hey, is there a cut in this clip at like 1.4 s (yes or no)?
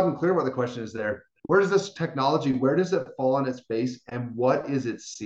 yes